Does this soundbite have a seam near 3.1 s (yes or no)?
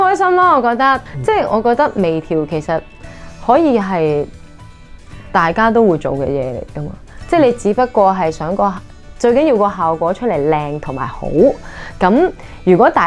no